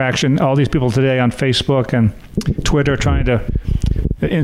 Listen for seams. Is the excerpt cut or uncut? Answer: uncut